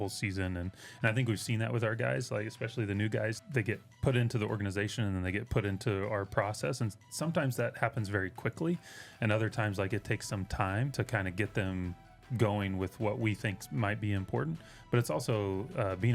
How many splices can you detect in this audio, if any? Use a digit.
2